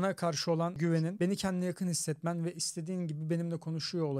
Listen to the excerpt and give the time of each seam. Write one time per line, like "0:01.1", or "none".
none